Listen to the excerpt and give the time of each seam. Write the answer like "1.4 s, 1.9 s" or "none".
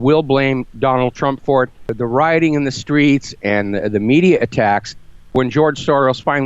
1.9 s, 5.3 s